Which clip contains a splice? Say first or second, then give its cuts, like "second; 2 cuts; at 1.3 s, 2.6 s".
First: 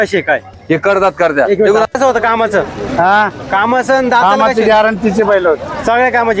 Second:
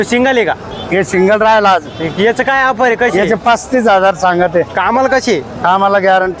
first; 1 cut; at 2.0 s